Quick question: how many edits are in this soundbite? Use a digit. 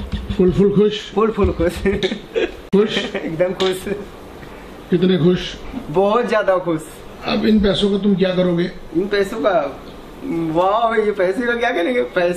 1